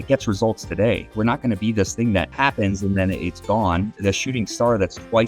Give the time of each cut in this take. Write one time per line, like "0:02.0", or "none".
0:01.1
0:02.3